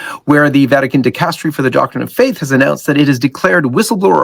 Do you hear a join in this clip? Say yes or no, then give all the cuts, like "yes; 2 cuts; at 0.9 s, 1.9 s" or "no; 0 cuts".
no; 0 cuts